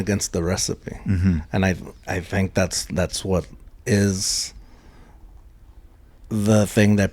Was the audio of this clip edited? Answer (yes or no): no